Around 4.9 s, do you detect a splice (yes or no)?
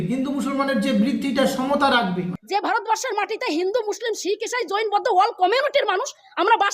no